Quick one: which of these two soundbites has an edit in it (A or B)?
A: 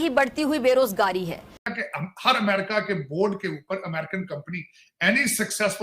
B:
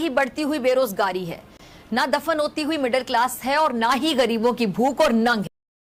A